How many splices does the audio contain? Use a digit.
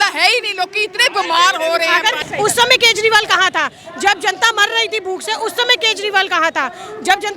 1